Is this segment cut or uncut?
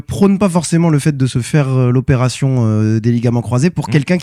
uncut